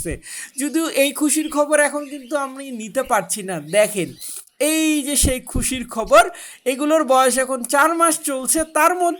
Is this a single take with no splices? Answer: yes; 0 cuts

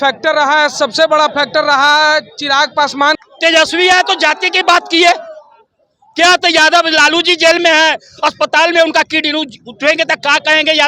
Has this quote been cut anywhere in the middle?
yes; 1 cut; at 3.2 s

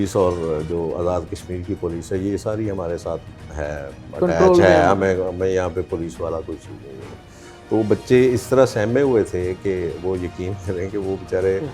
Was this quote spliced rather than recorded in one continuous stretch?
no; 0 cuts

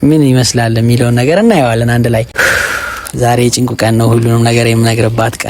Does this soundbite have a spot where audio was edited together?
yes; 1 cut; at 2.3 s

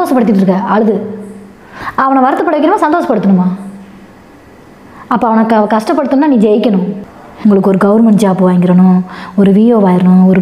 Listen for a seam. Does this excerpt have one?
yes; 1 cut; at 7.2 s

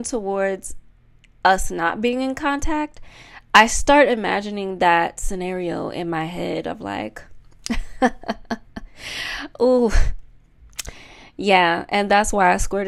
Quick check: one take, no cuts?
yes; 0 cuts

